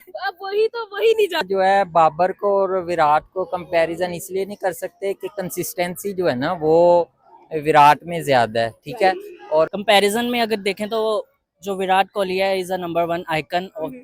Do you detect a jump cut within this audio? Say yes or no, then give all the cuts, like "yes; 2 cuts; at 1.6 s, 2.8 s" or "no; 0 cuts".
yes; 2 cuts; at 1.5 s, 9.7 s